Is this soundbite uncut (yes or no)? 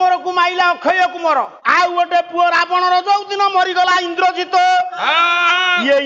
no